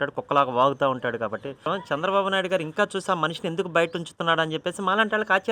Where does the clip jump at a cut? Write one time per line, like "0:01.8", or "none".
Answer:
0:01.6

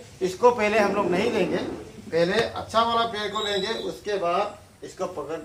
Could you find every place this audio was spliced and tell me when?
none

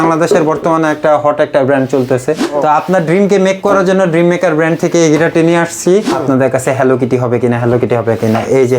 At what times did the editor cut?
0:02.4
0:06.1

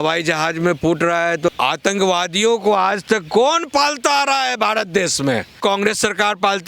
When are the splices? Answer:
0:01.5
0:05.5

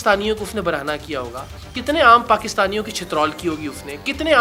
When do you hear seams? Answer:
none

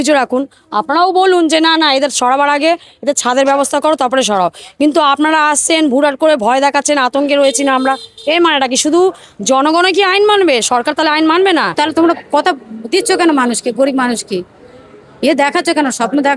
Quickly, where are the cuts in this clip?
0:11.8

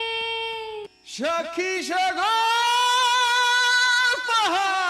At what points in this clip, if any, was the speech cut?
0:01.0

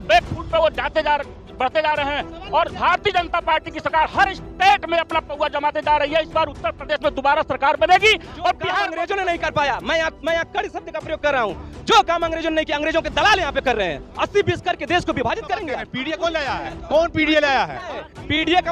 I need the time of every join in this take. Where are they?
0:08.8
0:15.9

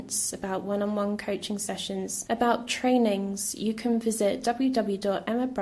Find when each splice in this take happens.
none

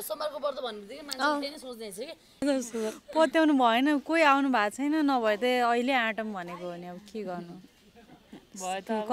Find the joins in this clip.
0:02.4

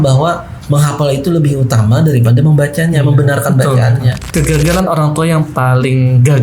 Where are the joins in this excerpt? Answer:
0:04.1

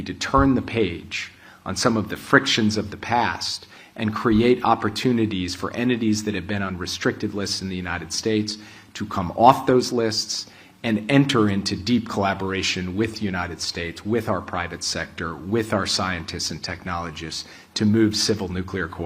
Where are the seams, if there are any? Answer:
none

